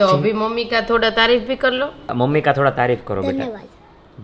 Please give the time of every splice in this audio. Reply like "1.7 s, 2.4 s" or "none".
2.1 s